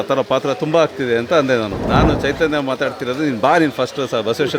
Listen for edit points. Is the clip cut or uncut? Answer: cut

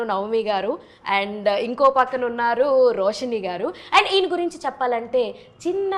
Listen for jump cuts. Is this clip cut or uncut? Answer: uncut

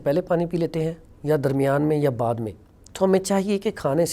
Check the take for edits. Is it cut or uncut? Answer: uncut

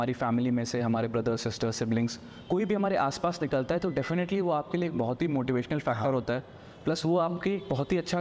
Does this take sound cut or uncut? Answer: uncut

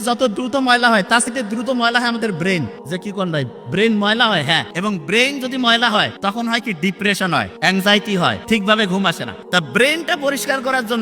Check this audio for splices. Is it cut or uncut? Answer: cut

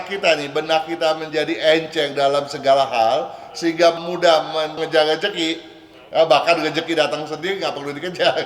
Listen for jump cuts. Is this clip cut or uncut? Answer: uncut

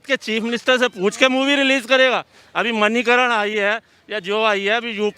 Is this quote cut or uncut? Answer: uncut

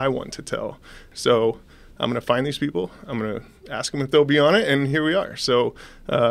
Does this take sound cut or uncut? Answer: cut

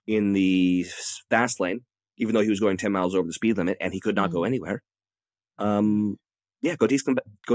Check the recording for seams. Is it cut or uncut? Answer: uncut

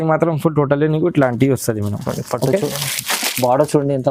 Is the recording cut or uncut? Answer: uncut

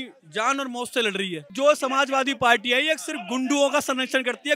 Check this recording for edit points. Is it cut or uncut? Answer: cut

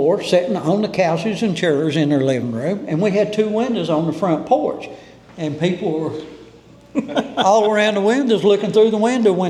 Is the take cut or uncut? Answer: uncut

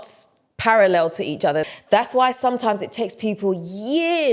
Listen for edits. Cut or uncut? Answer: cut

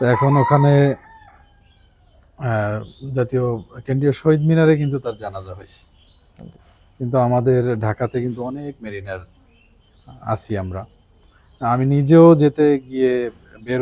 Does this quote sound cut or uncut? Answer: uncut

